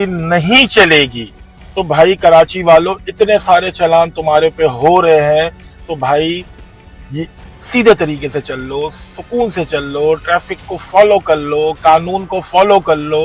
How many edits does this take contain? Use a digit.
0